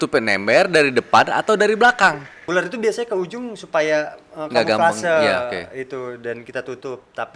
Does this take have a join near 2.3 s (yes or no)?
yes